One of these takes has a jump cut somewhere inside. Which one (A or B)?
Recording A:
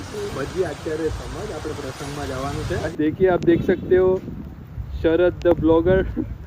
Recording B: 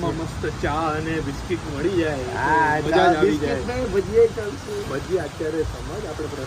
A